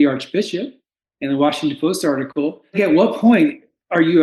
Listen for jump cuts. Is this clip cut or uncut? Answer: cut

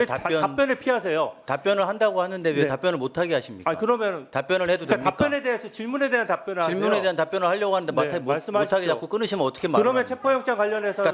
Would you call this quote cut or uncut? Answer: uncut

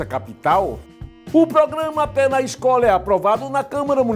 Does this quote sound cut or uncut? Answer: cut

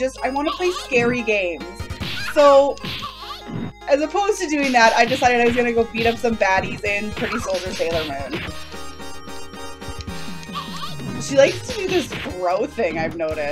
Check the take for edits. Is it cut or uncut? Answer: cut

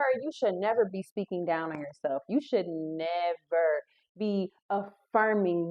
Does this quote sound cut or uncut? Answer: uncut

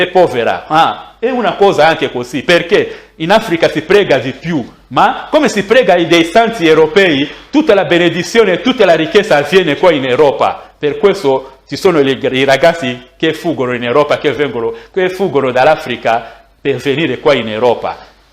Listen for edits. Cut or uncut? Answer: uncut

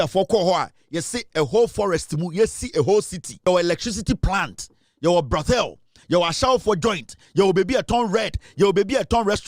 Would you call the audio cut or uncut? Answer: cut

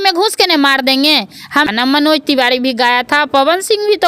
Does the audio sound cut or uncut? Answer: cut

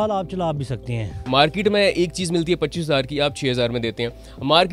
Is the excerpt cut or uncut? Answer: cut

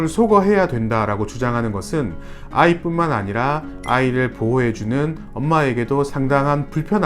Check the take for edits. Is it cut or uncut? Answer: uncut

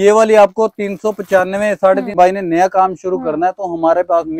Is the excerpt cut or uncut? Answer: cut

